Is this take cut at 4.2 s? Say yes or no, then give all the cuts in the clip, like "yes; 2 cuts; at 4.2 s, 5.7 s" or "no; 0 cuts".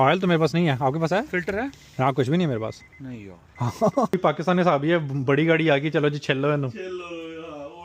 yes; 1 cut; at 4.2 s